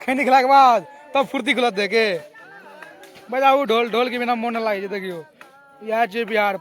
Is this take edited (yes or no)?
no